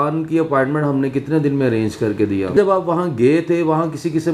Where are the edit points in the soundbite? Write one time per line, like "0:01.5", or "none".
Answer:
0:02.5